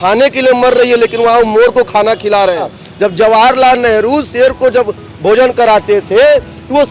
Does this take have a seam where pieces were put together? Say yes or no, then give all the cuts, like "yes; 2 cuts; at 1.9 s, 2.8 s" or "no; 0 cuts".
yes; 1 cut; at 2.8 s